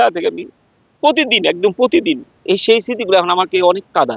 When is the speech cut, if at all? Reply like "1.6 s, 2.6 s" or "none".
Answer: 2.3 s